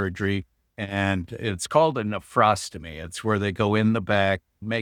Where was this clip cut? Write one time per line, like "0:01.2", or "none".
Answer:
none